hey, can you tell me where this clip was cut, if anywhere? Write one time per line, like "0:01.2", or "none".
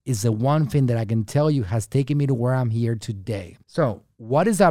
none